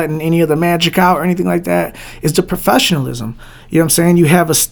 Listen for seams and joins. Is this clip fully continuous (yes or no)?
yes